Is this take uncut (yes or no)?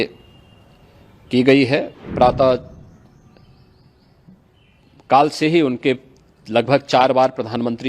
no